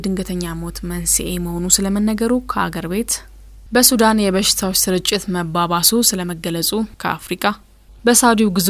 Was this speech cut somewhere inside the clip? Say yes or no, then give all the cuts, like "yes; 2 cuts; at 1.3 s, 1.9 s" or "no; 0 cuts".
yes; 1 cut; at 7.5 s